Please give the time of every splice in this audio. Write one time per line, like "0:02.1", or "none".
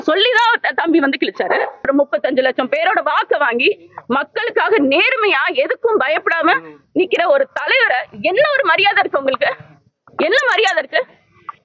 0:01.8